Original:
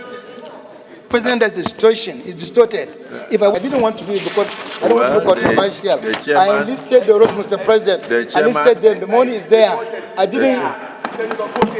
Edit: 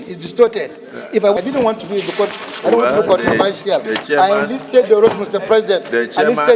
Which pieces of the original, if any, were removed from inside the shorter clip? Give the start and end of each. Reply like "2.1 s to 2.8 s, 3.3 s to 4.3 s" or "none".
none